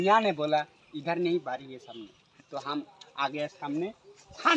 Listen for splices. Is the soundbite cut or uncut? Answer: cut